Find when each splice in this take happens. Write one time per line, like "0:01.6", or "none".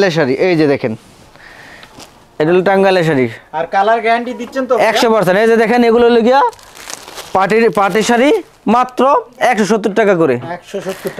none